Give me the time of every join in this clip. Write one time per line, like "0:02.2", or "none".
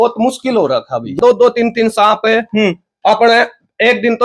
0:01.2